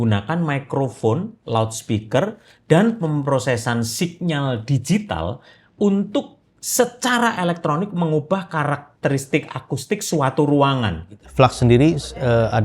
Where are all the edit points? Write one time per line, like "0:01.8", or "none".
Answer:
0:11.2